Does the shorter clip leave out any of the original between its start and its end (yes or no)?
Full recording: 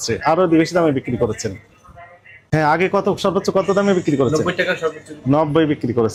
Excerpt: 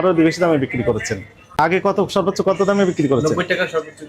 yes